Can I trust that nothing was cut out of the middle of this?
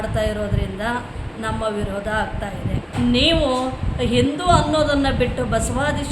no; 1 cut; at 2.8 s

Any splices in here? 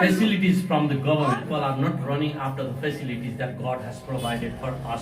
yes; 1 cut; at 1.5 s

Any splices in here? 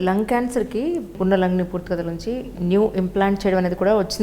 yes; 1 cut; at 1.2 s

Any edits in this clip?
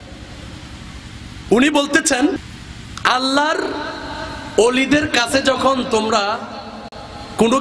yes; 1 cut; at 2.3 s

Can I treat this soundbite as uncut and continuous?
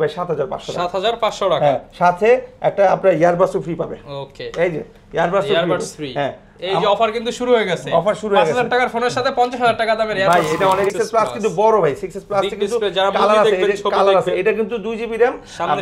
no; 1 cut; at 10.9 s

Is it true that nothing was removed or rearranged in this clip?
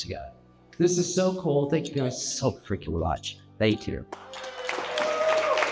yes; 0 cuts

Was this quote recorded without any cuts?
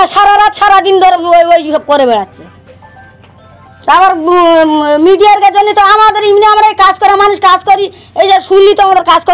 yes; 0 cuts

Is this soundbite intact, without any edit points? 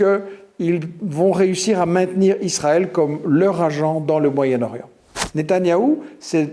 no; 1 cut; at 5.2 s

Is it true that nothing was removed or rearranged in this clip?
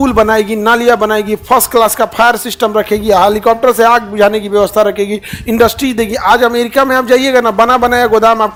yes; 0 cuts

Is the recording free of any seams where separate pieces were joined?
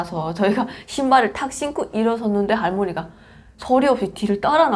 yes; 0 cuts

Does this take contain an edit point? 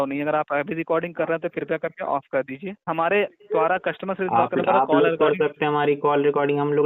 yes; 1 cut; at 2.9 s

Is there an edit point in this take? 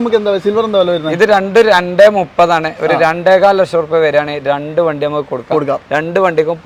no; 0 cuts

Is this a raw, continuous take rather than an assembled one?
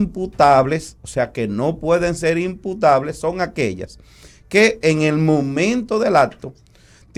yes; 0 cuts

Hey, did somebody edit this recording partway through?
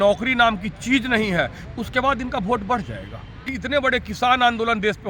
yes; 1 cut; at 3.6 s

